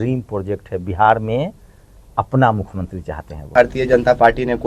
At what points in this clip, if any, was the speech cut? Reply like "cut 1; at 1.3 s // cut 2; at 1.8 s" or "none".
cut 1; at 3.5 s